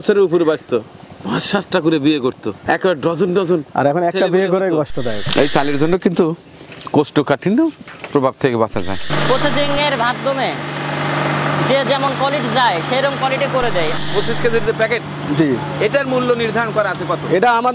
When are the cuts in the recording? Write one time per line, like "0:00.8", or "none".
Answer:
0:02.6
0:05.2
0:09.1
0:14.0

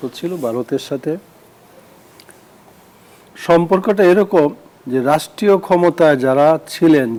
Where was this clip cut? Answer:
none

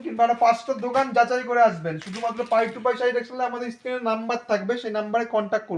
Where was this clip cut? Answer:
none

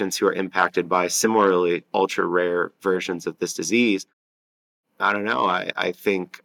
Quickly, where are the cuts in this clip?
0:01.1
0:04.2

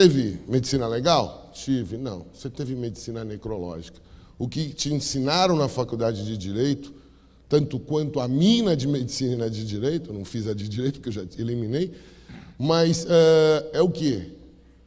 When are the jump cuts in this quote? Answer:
none

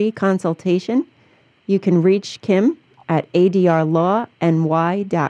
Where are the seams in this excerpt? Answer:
none

